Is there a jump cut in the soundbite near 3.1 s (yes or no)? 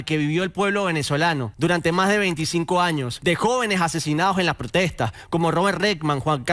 yes